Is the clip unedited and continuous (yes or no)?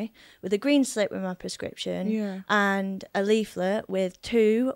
yes